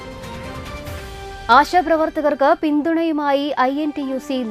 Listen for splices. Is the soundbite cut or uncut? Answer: cut